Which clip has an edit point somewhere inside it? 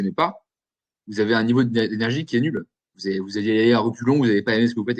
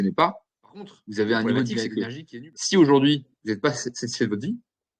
second; 1 cut; at 1.9 s

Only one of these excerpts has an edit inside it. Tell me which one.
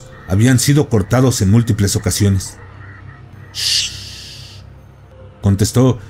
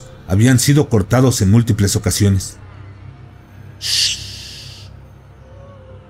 first; 2 cuts; at 3.3 s, 5.1 s

